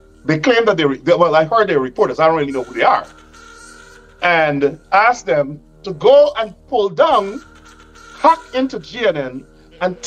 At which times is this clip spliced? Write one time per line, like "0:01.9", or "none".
none